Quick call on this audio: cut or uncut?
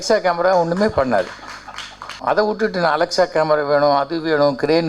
cut